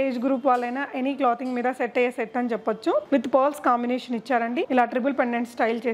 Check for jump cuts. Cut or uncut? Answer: uncut